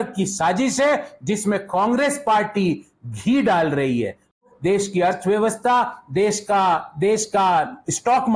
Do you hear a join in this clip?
yes; 1 cut; at 4.5 s

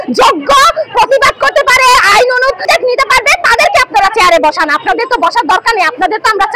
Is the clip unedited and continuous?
yes; 0 cuts

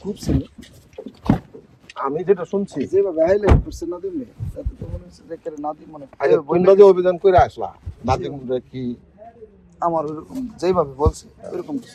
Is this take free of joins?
yes; 0 cuts

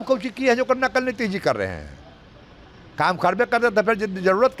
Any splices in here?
no; 0 cuts

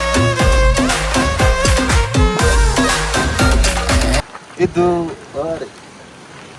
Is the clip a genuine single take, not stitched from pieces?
yes; 0 cuts

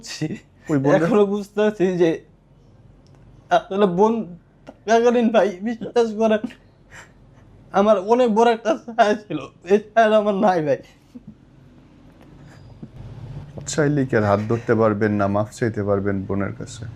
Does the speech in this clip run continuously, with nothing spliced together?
yes; 0 cuts

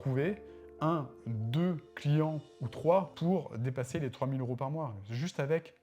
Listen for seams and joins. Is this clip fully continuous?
no; 1 cut; at 3.1 s

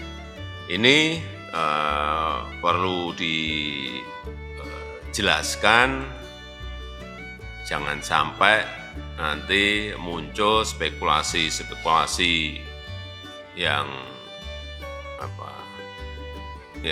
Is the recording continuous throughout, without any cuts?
no; 2 cuts; at 3.9 s, 5.1 s

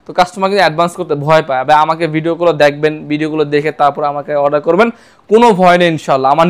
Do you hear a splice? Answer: no; 0 cuts

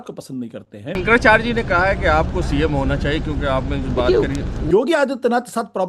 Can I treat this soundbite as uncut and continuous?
no; 2 cuts; at 1.0 s, 4.6 s

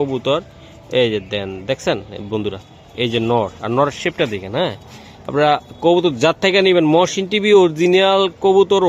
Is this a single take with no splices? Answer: yes; 0 cuts

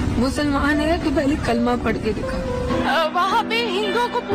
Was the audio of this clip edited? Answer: yes; 1 cut; at 2.8 s

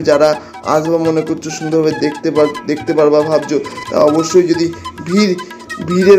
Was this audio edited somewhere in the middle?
no; 0 cuts

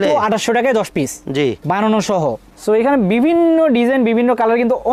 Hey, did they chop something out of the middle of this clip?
no; 0 cuts

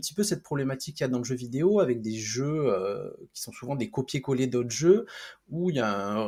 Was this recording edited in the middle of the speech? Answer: no; 0 cuts

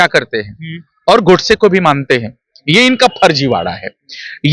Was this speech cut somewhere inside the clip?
no; 0 cuts

